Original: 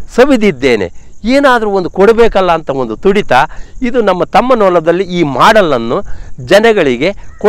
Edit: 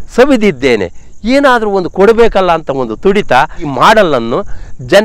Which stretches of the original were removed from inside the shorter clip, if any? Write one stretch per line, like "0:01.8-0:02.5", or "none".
0:03.6-0:05.2